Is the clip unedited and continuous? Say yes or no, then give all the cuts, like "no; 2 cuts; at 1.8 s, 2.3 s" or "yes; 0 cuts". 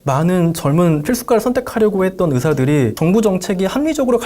no; 1 cut; at 2.9 s